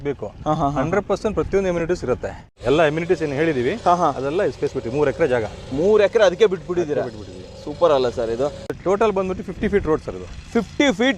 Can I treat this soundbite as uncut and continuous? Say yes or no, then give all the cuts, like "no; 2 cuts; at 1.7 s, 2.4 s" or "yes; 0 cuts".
no; 2 cuts; at 2.4 s, 8.6 s